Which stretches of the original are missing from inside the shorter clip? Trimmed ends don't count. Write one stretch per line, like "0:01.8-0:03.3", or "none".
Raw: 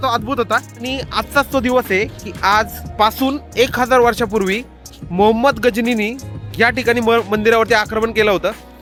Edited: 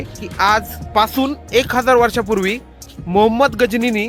none